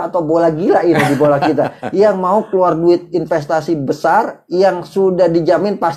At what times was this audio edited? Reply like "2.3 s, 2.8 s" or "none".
none